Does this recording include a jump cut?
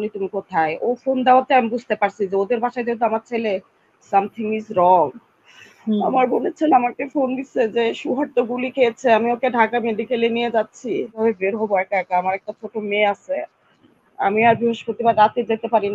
yes; 1 cut; at 11.2 s

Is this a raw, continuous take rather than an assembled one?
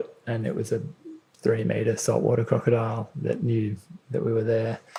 yes; 0 cuts

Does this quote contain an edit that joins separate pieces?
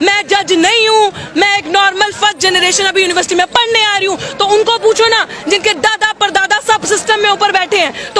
no; 0 cuts

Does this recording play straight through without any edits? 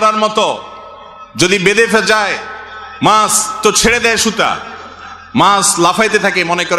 yes; 0 cuts

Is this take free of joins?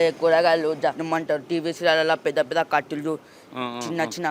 no; 1 cut; at 1.0 s

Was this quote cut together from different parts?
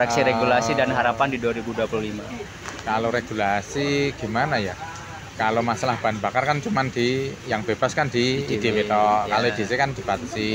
no; 0 cuts

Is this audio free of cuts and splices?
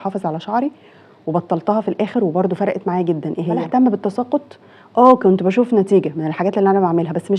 no; 1 cut; at 3.6 s

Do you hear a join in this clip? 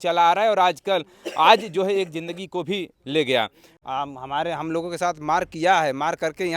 yes; 1 cut; at 3.7 s

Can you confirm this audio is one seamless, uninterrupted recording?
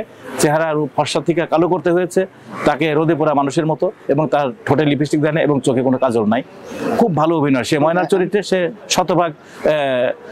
yes; 0 cuts

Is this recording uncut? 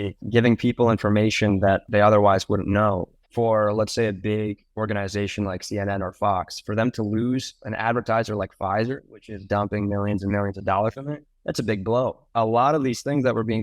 no; 2 cuts; at 3.2 s, 12.2 s

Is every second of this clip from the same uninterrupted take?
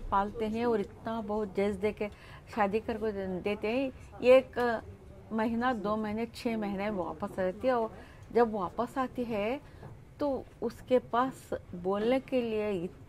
yes; 0 cuts

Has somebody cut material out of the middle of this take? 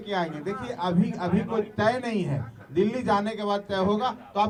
no; 0 cuts

